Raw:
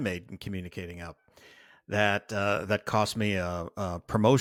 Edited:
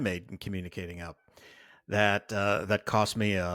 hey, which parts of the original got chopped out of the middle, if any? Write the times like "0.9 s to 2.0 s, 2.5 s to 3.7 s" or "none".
none